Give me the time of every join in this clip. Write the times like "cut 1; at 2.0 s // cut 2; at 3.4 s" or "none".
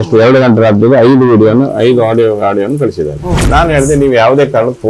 cut 1; at 3.4 s